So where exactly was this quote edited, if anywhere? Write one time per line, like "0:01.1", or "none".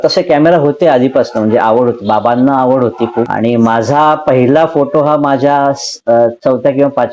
none